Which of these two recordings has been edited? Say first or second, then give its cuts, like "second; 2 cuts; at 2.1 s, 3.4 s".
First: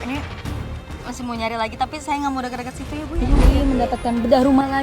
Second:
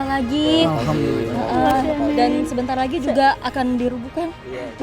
first; 1 cut; at 3.5 s